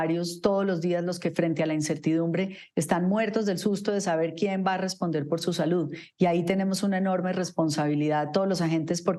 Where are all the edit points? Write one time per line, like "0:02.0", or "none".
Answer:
none